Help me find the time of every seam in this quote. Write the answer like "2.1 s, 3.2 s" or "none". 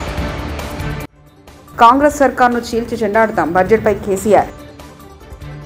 1.8 s